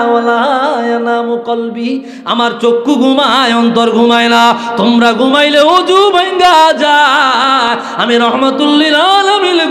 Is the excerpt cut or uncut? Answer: uncut